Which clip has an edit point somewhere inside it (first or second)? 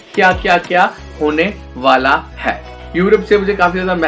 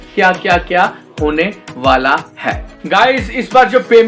first